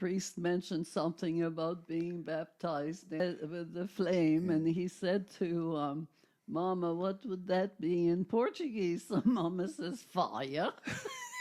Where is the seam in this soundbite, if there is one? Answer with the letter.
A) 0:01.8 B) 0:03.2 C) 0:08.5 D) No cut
B